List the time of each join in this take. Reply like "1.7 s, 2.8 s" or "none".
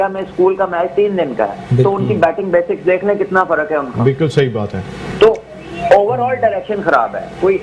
none